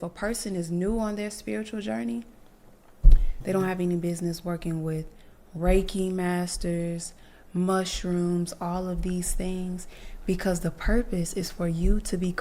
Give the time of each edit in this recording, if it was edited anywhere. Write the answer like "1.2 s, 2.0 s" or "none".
3.4 s

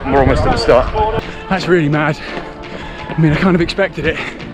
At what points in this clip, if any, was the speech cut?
1.2 s

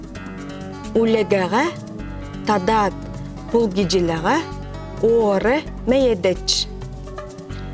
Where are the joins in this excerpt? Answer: 0.9 s

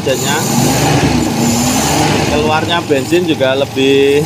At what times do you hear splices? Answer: none

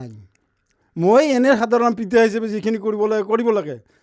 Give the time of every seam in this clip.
none

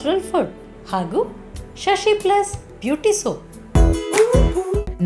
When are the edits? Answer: 3.5 s

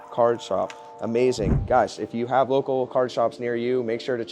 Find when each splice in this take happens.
1.6 s

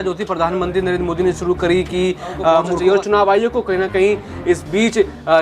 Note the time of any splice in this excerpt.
2.7 s

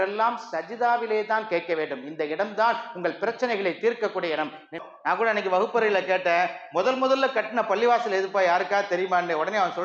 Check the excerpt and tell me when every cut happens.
4.8 s

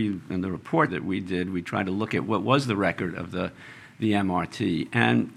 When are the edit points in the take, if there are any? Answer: 0.9 s

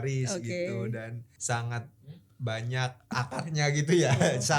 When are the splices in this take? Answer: 1.3 s, 3.1 s

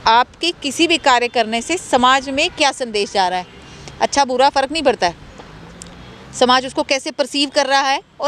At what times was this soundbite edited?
none

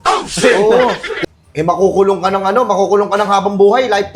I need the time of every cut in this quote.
1.1 s

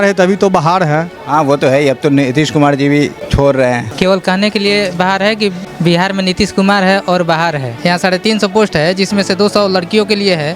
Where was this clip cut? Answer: 3.2 s, 3.9 s, 5.7 s, 7.7 s

